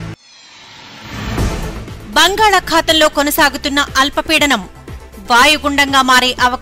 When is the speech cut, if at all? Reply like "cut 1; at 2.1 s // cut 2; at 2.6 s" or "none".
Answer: cut 1; at 1.8 s